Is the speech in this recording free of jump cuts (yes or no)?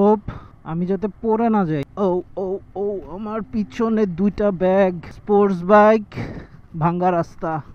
no